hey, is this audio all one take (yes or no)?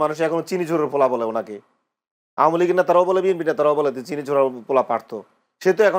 yes